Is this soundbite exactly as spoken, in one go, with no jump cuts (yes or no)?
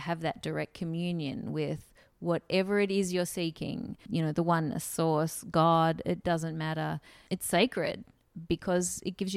no